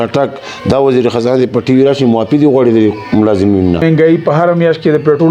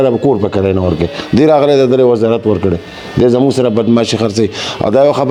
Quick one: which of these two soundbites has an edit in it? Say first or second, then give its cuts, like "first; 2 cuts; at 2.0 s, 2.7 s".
first; 1 cut; at 3.8 s